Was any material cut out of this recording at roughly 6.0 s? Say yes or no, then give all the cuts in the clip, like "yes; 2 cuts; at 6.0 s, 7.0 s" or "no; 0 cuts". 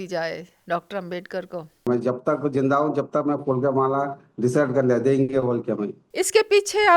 yes; 1 cut; at 6.0 s